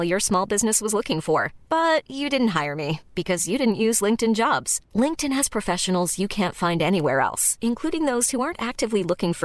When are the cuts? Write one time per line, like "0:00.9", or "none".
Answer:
none

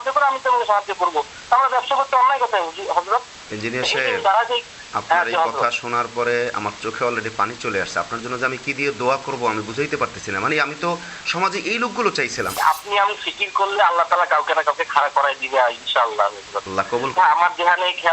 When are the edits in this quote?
0:12.5
0:17.1

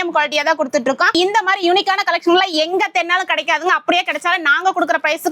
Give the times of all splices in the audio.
0:01.1

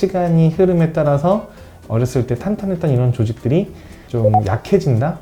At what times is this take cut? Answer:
none

